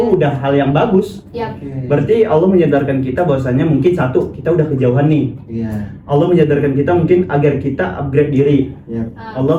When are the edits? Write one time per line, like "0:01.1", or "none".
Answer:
none